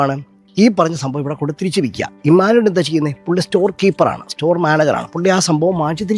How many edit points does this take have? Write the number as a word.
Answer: zero